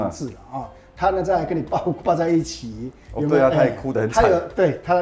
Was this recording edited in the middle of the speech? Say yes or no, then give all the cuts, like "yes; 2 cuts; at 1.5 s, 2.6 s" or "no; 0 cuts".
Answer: no; 0 cuts